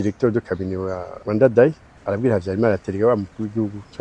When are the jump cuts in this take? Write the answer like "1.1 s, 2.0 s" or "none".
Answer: 1.1 s, 1.9 s